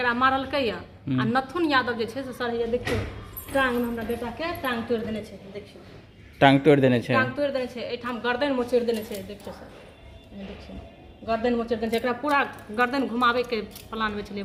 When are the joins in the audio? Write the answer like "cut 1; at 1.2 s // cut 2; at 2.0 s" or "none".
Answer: none